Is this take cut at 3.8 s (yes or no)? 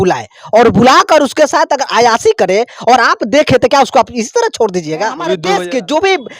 no